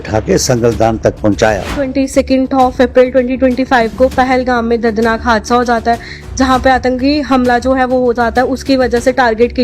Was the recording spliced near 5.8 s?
no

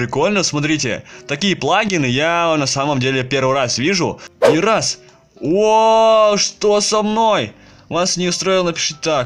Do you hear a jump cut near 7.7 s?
no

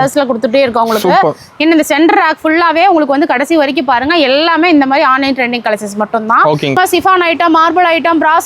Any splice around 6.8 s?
yes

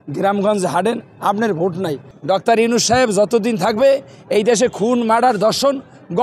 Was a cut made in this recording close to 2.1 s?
yes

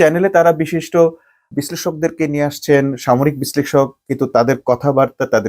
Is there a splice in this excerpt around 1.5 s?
yes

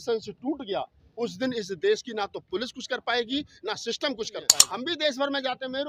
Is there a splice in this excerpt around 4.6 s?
yes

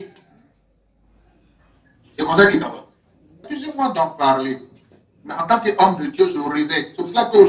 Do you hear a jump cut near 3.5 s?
yes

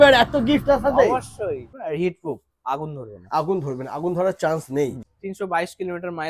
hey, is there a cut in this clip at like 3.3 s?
no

